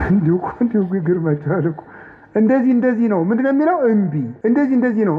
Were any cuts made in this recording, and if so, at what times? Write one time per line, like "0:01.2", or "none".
0:04.3